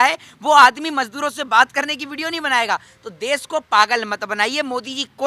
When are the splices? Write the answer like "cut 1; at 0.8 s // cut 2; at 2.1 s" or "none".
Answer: none